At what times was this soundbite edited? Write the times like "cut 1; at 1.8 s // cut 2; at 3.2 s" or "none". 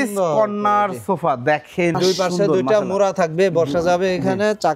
cut 1; at 2.0 s